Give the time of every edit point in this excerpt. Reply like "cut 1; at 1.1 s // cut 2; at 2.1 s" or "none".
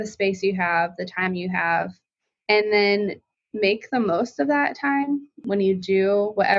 cut 1; at 5.3 s